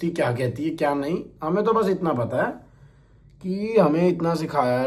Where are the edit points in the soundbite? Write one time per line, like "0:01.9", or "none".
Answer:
none